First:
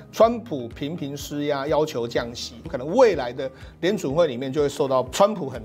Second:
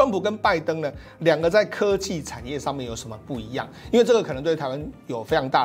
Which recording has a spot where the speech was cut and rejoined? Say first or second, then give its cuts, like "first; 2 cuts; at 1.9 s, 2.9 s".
first; 1 cut; at 2.7 s